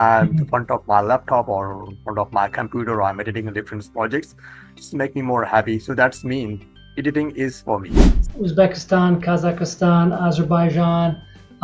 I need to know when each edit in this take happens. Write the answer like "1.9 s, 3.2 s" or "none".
8.2 s